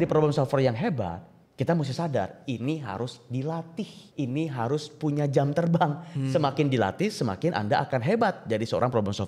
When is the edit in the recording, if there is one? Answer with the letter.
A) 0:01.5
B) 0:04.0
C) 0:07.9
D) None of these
B